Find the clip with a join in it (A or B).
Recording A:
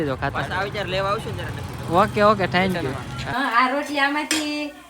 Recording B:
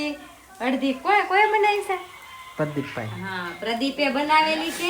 A